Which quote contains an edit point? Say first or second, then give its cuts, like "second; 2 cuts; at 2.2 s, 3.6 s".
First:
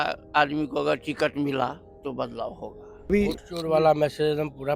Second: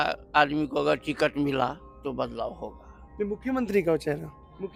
first; 1 cut; at 3.1 s